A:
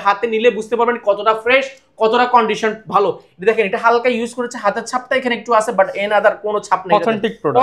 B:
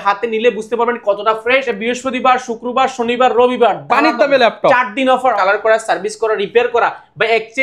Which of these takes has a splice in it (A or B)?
B